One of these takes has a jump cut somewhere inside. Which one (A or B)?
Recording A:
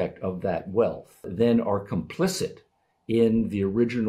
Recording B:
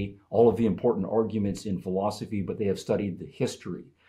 A